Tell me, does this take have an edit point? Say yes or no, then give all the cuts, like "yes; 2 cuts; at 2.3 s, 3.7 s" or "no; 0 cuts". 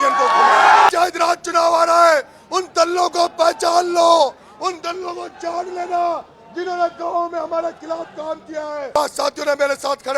yes; 2 cuts; at 0.9 s, 9.0 s